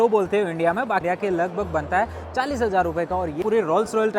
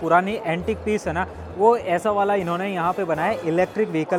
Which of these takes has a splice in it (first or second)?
first